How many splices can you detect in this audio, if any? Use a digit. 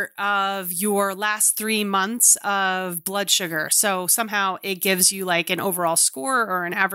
0